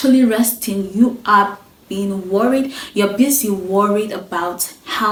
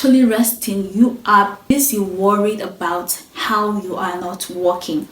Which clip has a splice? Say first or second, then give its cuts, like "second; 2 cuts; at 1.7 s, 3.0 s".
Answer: second; 1 cut; at 1.7 s